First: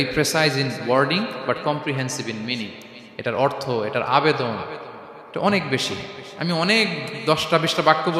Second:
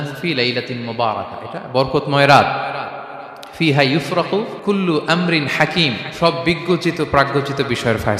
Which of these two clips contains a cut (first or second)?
second